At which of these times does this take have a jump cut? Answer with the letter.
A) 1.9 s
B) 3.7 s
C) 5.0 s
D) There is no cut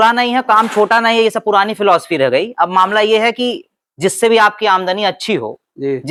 D